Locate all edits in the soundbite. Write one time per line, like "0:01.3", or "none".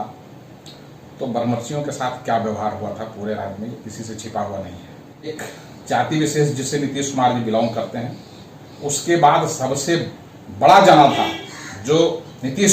0:05.3